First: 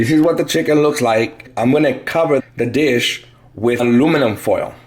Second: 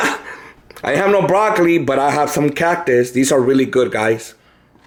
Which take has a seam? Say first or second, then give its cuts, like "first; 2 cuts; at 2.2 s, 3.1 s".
first; 3 cuts; at 1.5 s, 2.4 s, 3.8 s